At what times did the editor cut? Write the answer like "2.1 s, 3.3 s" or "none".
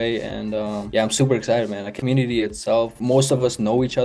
1.9 s, 3.0 s